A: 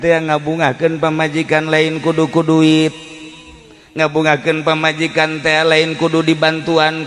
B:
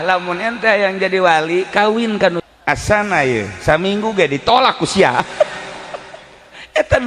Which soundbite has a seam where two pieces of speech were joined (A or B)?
B